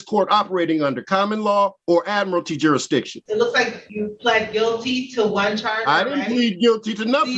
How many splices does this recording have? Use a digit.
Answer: 3